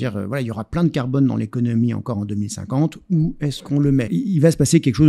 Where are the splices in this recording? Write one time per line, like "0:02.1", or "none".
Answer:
0:04.1